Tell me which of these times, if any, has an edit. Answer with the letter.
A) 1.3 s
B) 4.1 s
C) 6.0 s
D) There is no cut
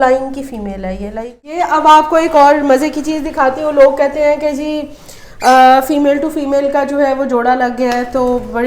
A